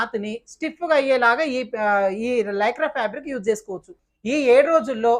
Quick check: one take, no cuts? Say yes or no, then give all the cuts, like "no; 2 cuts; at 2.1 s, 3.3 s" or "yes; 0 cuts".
no; 1 cut; at 4.0 s